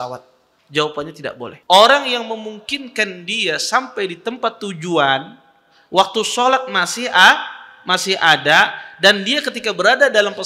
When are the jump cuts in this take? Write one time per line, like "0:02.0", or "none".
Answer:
0:01.6